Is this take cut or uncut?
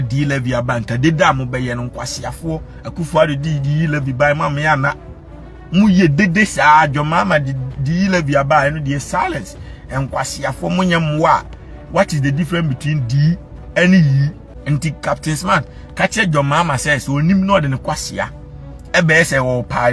cut